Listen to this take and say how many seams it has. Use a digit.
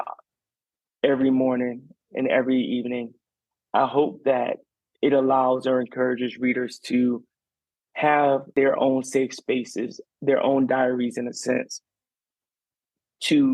1